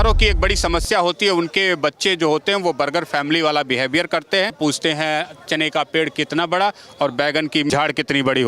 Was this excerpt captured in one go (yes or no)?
no